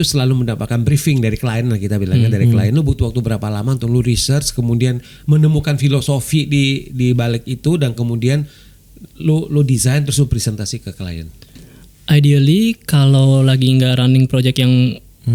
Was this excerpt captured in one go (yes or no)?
yes